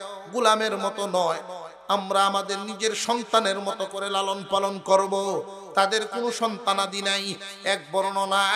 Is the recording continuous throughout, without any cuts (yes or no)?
yes